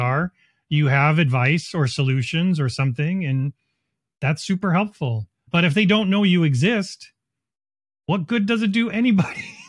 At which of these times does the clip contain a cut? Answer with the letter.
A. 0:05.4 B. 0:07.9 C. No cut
A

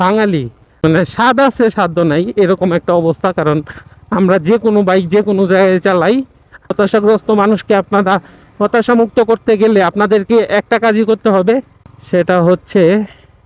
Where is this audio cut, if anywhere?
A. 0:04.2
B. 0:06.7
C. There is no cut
B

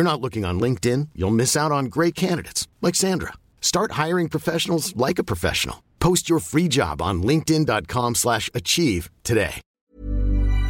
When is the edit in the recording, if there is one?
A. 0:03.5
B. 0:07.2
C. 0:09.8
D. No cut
C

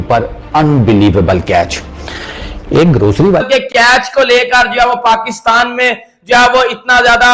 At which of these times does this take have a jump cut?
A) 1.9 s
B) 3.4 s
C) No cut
B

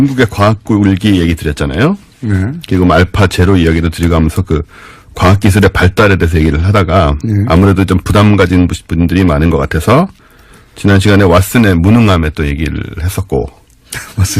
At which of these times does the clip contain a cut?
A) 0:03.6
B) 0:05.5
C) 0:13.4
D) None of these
C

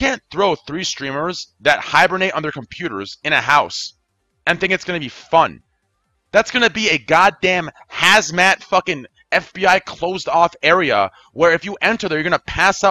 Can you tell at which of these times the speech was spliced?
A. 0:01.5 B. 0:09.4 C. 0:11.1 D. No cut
D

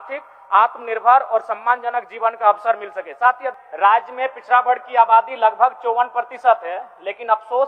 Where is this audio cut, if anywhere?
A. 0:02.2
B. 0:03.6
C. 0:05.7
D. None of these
B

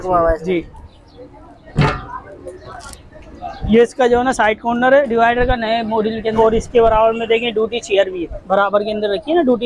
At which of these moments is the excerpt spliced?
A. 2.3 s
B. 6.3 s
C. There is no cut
B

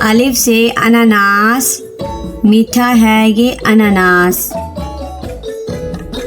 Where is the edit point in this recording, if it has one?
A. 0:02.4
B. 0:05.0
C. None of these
B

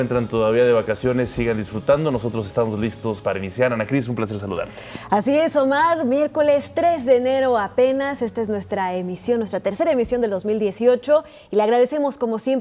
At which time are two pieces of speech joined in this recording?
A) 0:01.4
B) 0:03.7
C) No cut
C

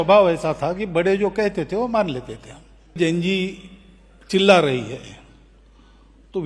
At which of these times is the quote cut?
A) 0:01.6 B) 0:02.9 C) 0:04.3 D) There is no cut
B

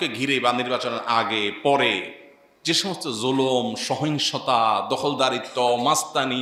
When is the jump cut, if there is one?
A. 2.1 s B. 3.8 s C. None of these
C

